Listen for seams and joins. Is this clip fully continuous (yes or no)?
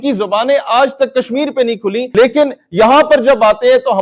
no